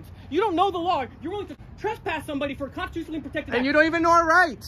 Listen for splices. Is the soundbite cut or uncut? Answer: cut